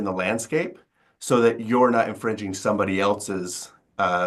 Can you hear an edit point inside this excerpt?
no; 0 cuts

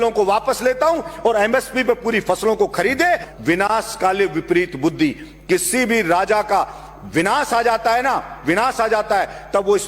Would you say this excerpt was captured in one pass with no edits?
no; 1 cut; at 3.3 s

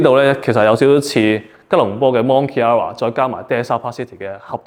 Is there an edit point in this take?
no; 0 cuts

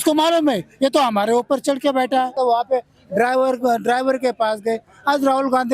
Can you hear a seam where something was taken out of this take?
yes; 1 cut; at 2.3 s

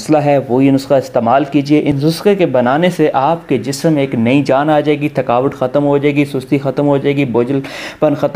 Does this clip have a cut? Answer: yes; 1 cut; at 2.0 s

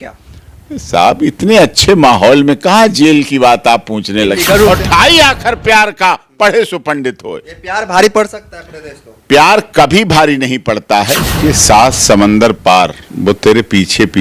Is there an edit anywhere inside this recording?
yes; 3 cuts; at 4.7 s, 11.4 s, 13.1 s

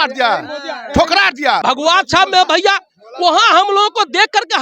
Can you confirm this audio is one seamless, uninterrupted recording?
no; 1 cut; at 1.6 s

